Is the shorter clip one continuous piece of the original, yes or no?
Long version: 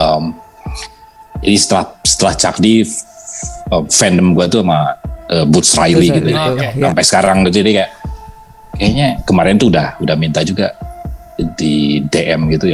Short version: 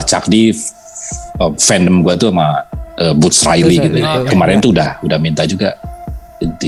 no